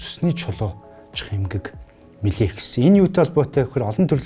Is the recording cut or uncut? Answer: uncut